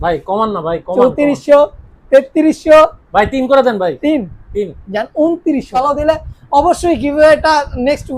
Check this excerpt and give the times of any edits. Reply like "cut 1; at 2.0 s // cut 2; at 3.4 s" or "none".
cut 1; at 5.8 s